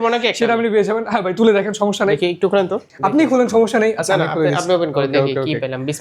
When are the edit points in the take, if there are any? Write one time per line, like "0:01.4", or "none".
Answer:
0:02.9